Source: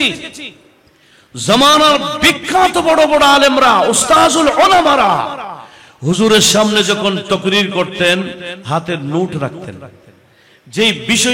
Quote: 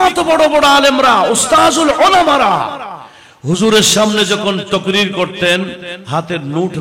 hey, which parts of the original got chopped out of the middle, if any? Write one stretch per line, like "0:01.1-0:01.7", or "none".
none